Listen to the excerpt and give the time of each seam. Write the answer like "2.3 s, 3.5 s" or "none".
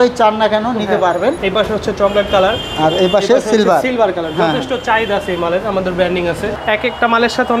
1.4 s, 6.5 s